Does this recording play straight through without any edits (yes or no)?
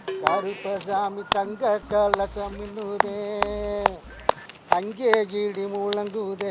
yes